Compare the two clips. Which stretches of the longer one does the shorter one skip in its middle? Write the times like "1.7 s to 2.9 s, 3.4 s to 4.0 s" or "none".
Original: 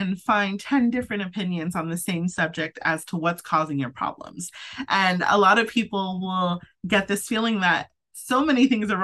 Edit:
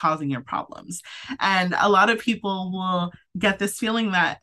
none